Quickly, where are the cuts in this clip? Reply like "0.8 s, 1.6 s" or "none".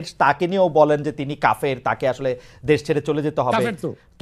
none